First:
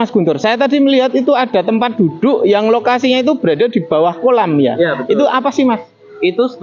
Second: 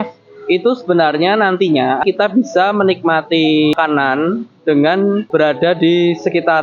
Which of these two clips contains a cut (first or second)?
second